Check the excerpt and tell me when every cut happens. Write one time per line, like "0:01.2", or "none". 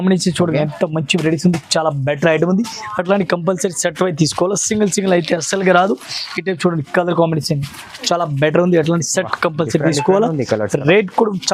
none